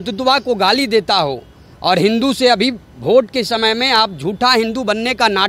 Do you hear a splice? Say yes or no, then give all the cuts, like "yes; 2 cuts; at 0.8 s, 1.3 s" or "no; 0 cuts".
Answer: no; 0 cuts